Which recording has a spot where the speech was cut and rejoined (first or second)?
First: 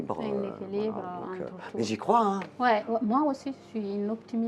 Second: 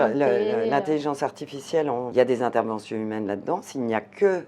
second